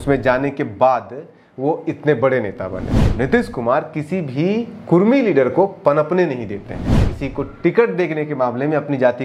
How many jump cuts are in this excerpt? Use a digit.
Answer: 2